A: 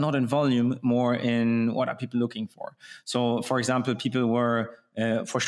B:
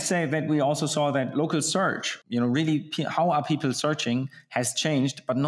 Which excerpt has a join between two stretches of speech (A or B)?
B